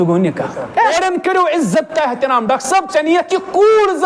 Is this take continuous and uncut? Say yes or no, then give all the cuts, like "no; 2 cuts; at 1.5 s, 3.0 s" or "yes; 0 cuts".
no; 1 cut; at 0.9 s